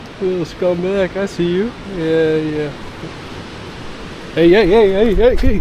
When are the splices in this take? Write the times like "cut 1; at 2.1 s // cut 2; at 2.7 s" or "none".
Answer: cut 1; at 3.0 s